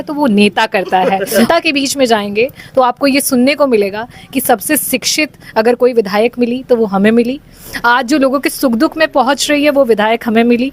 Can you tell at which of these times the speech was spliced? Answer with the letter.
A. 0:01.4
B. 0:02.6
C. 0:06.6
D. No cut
A